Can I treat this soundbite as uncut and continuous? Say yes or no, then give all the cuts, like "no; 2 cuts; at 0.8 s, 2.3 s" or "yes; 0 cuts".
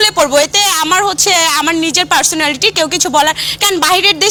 yes; 0 cuts